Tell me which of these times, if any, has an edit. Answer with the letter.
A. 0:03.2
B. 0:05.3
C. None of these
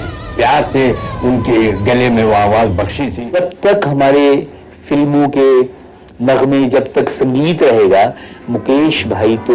A